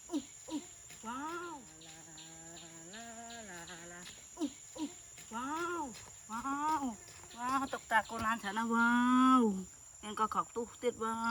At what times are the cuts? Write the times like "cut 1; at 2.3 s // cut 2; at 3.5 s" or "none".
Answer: cut 1; at 1.3 s